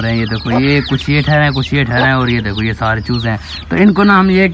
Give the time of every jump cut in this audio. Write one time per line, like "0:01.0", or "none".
none